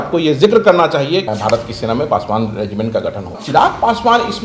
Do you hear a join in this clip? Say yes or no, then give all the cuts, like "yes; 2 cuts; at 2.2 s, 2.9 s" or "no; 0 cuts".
yes; 2 cuts; at 1.3 s, 3.4 s